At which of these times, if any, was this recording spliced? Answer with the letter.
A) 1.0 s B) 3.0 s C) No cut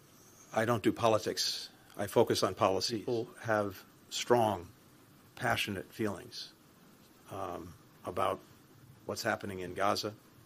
B